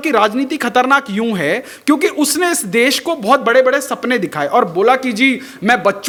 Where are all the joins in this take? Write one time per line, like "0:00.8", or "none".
none